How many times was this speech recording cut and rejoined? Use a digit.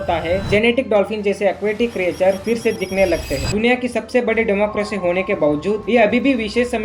1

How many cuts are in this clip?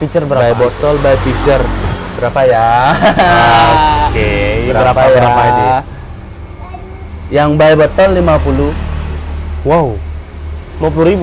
0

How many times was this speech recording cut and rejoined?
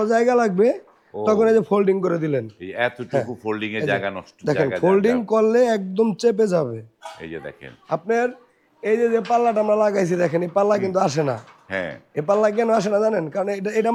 0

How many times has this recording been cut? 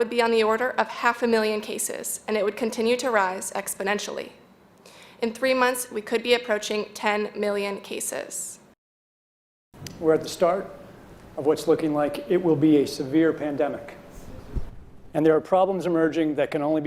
1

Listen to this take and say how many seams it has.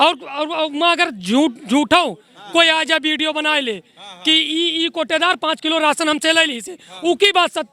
0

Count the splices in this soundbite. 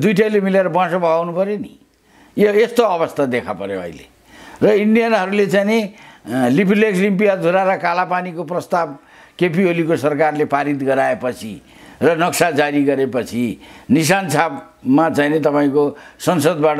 0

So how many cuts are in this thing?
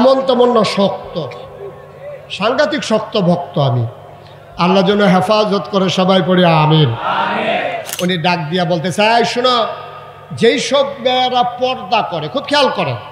1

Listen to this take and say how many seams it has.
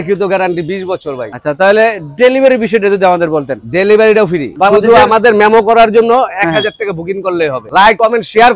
3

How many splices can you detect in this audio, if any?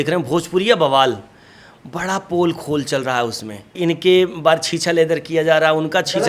1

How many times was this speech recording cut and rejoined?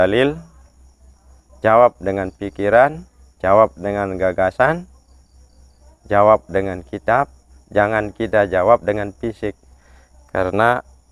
0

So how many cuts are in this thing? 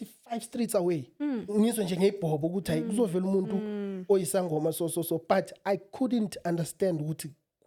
0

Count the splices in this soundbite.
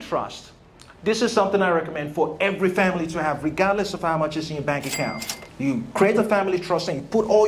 0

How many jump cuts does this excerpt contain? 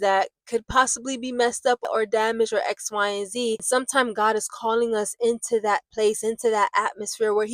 2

